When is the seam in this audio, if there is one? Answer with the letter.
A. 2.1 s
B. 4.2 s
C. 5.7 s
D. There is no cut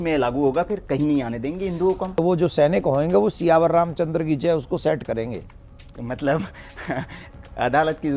A